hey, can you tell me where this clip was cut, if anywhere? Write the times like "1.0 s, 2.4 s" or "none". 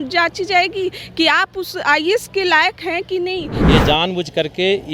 3.5 s